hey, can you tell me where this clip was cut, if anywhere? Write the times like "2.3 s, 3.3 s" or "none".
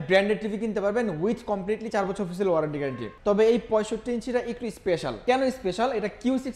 3.1 s, 5.1 s